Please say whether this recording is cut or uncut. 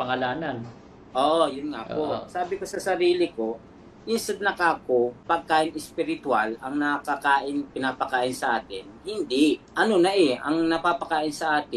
cut